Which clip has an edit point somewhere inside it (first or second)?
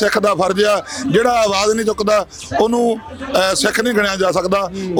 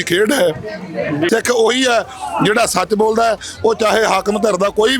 second